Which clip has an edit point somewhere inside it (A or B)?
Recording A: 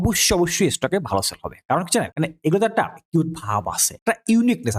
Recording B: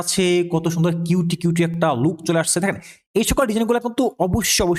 A